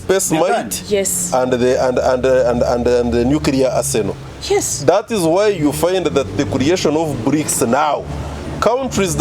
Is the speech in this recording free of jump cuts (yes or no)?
yes